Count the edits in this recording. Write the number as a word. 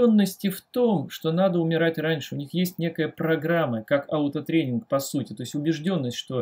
zero